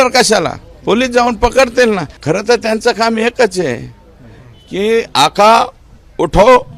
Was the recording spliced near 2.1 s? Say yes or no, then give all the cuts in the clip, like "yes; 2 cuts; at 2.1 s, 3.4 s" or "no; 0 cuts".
yes; 1 cut; at 2.1 s